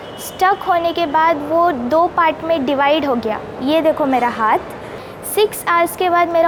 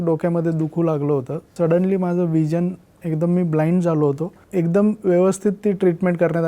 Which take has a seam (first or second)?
second